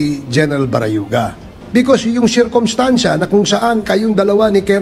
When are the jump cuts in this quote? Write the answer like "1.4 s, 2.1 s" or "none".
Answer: 1.5 s

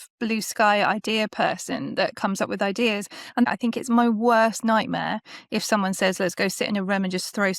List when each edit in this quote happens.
3.4 s

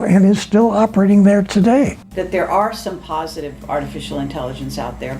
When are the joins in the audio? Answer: 2.0 s

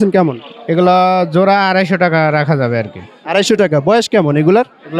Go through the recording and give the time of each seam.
none

